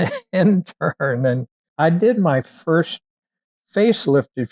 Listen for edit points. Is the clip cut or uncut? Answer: cut